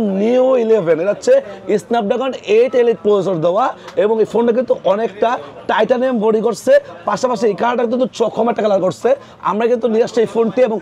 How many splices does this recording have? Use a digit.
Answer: 0